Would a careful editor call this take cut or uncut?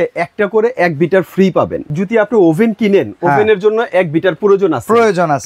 cut